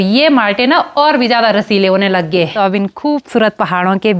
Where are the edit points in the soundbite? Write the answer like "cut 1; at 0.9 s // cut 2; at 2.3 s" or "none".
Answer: cut 1; at 2.5 s